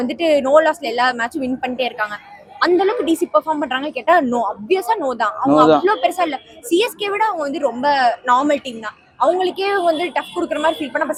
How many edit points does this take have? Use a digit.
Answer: 0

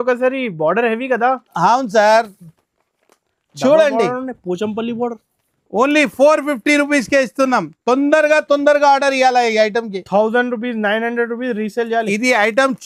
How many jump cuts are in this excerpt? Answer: 0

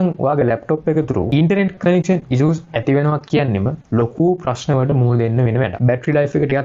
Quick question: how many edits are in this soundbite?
1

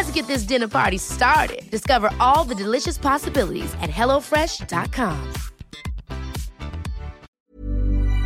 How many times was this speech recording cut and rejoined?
1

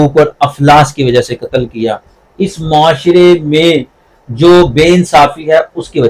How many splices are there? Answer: 0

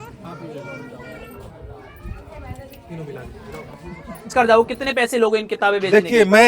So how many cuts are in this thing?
1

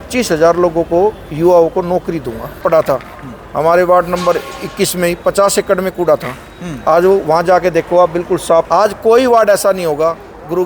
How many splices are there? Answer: 2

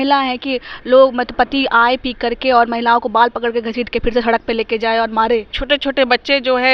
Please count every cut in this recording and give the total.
1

